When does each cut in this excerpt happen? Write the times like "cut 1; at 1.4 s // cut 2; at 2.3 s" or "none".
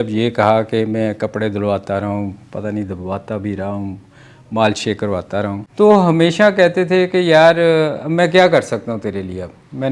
cut 1; at 5.6 s